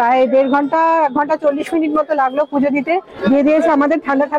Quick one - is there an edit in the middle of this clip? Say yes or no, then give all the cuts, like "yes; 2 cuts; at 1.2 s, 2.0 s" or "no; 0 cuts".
yes; 1 cut; at 3.1 s